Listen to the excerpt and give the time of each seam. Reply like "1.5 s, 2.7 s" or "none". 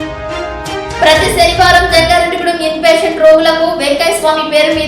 1.0 s